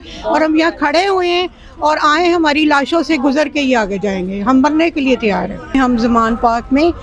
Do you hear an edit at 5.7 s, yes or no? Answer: yes